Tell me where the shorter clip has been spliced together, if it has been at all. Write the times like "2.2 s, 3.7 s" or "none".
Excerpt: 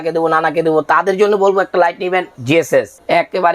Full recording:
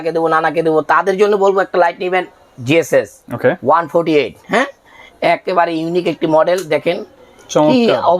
2.6 s